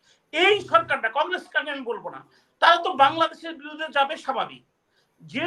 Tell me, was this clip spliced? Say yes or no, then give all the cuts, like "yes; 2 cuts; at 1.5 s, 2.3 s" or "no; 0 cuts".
no; 0 cuts